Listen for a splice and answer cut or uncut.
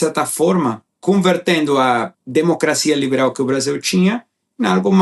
cut